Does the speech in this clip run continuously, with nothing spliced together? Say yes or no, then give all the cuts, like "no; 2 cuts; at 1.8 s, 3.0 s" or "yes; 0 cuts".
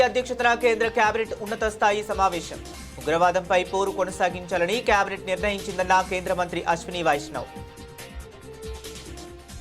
no; 1 cut; at 7.3 s